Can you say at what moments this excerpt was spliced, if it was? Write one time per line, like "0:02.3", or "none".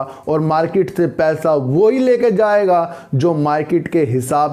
none